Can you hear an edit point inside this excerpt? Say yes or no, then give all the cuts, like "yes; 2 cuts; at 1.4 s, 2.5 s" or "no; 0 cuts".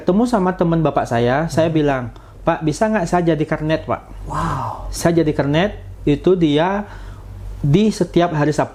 no; 0 cuts